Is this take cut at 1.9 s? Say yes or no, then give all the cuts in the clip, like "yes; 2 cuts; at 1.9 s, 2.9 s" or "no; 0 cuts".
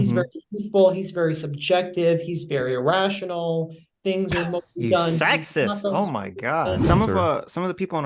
no; 1 cut; at 6.8 s